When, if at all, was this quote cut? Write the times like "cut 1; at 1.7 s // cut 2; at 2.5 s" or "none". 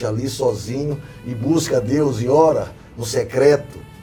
none